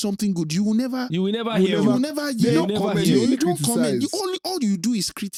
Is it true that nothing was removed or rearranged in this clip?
yes; 0 cuts

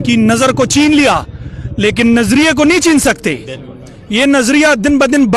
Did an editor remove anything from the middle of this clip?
no; 0 cuts

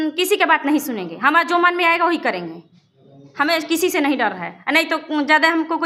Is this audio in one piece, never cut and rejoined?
yes; 0 cuts

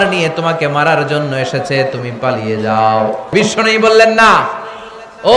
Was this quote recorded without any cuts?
no; 1 cut; at 3.3 s

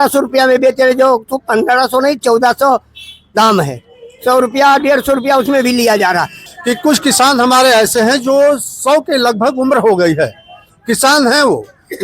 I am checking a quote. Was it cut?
yes; 1 cut; at 6.5 s

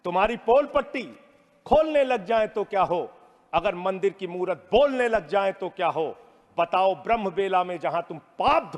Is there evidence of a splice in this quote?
no; 0 cuts

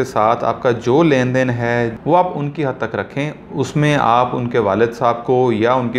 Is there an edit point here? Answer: yes; 1 cut; at 2.0 s

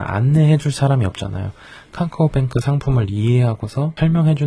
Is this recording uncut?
yes; 0 cuts

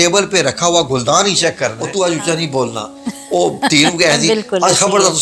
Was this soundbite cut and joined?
yes; 1 cut; at 1.8 s

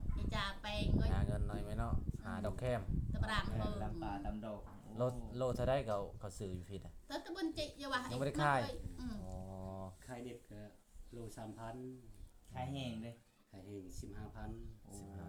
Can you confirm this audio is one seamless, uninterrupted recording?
yes; 0 cuts

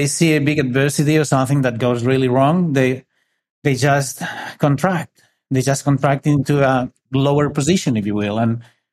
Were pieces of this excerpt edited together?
yes; 1 cut; at 7.0 s

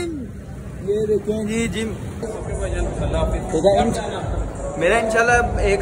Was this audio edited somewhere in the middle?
yes; 1 cut; at 2.3 s

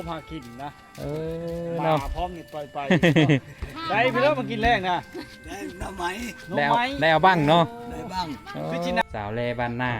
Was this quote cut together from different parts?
yes; 1 cut; at 9.0 s

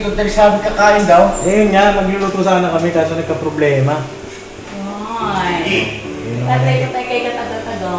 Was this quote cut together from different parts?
no; 0 cuts

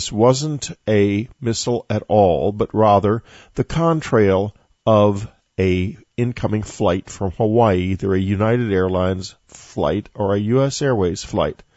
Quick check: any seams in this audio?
yes; 1 cut; at 10.5 s

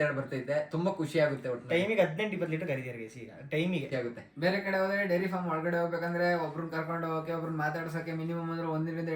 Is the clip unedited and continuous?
no; 1 cut; at 3.9 s

